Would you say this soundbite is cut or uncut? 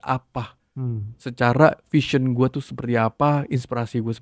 uncut